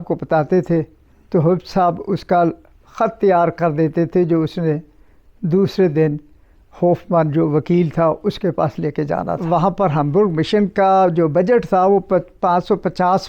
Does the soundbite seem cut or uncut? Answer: cut